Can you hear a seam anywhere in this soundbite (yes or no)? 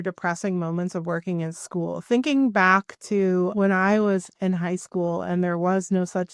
yes